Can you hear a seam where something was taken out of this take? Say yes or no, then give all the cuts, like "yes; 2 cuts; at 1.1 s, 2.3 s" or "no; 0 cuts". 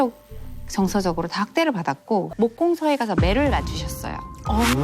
yes; 1 cut; at 2.3 s